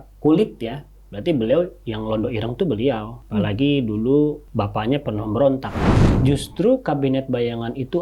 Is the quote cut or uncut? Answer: cut